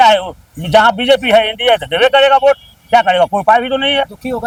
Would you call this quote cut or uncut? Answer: uncut